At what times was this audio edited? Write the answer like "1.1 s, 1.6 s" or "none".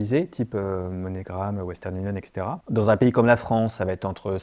2.6 s